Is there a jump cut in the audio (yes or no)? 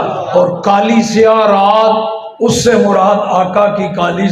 no